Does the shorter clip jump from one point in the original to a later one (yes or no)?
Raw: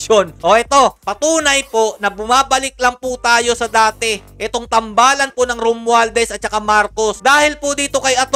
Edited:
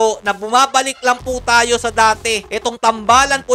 yes